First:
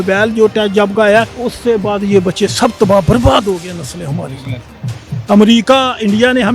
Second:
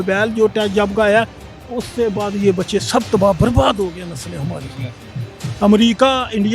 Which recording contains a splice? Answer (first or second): first